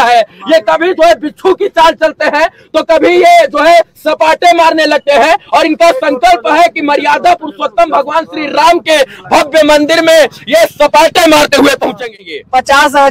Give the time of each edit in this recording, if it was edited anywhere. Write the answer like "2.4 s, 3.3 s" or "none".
12.2 s